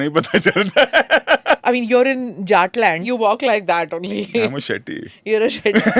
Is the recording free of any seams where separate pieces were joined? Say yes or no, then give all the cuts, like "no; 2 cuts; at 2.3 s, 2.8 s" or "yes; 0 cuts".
no; 2 cuts; at 1.6 s, 3.0 s